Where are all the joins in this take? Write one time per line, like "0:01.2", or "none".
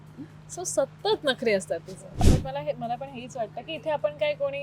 0:02.3